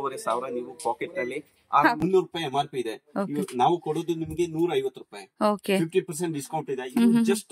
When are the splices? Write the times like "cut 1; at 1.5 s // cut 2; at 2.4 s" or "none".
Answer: cut 1; at 2.0 s